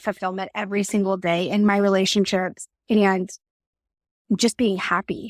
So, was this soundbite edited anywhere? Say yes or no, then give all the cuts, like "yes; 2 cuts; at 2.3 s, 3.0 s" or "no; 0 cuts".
no; 0 cuts